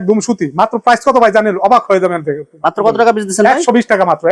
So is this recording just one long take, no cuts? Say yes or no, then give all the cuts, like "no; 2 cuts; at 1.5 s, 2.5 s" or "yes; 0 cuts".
yes; 0 cuts